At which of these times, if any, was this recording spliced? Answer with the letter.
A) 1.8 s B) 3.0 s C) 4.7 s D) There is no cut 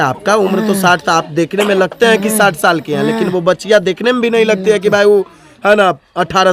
D